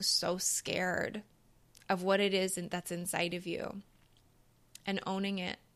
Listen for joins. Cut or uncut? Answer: uncut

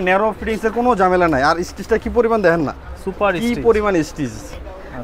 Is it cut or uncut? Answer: uncut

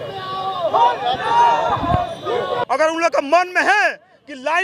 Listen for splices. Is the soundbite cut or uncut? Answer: cut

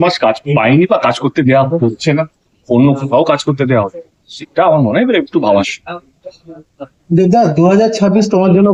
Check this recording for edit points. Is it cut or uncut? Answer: uncut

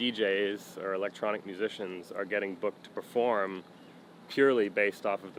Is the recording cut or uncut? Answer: uncut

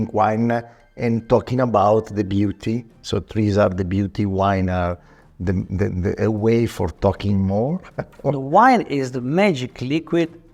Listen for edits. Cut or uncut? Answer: uncut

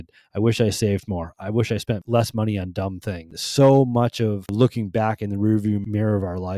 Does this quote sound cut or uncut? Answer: cut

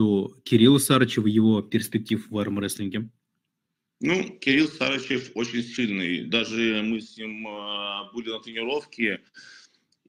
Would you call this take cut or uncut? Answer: uncut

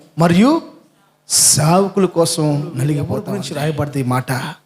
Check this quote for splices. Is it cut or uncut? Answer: cut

